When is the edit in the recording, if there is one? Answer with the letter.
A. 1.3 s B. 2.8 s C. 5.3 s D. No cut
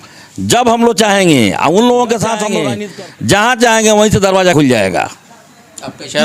B